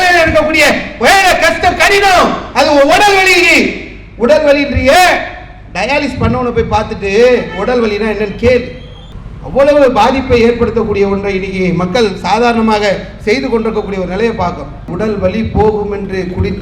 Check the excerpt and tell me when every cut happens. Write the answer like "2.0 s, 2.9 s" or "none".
14.9 s